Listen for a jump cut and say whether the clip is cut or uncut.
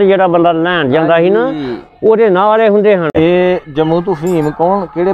cut